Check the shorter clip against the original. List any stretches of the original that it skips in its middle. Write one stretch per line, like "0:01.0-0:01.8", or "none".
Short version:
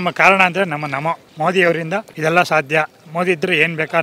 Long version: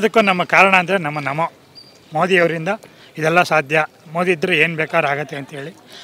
0:01.6-0:02.0
0:02.8-0:03.1